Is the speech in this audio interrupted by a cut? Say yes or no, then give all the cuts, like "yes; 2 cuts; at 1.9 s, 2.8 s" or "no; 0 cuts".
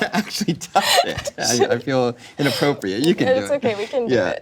no; 0 cuts